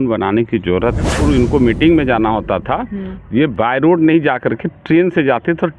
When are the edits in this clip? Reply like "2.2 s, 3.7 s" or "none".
1.1 s

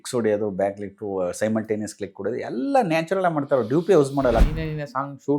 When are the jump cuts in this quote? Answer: 4.4 s

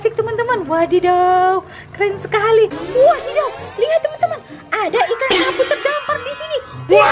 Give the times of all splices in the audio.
2.8 s

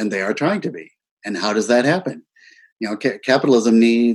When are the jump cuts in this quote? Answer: 1.0 s

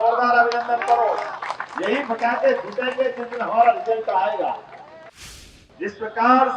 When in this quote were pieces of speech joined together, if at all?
5.1 s

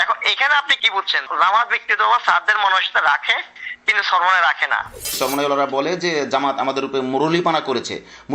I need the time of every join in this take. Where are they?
1.3 s, 5.1 s

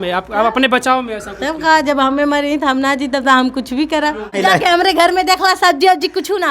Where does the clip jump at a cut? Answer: 4.4 s

